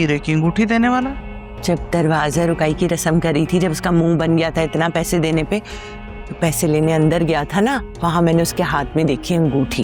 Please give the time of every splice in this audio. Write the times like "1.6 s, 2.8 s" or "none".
none